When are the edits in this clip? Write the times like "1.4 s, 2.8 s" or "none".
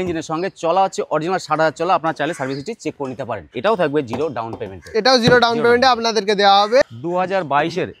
3.5 s, 6.9 s